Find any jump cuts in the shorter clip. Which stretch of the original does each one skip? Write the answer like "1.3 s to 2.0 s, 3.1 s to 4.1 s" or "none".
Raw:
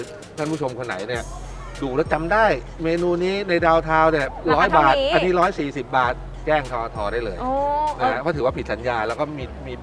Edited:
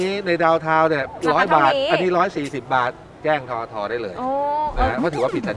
none

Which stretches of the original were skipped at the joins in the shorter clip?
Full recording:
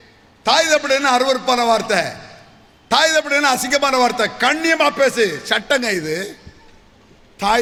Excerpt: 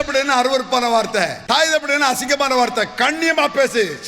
2.1 s to 2.8 s

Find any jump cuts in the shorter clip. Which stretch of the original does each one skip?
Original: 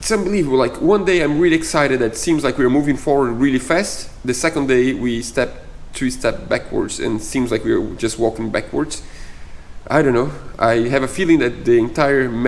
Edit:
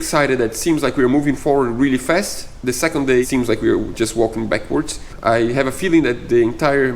4.9 s to 7.3 s, 9.1 s to 10.4 s

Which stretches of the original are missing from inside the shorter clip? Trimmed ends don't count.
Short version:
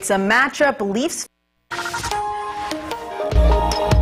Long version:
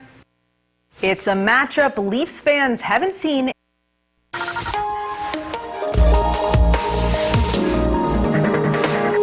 2.4 s to 3.8 s

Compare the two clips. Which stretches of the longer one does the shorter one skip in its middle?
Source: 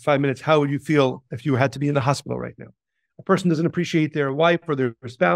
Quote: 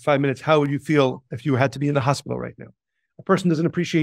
none

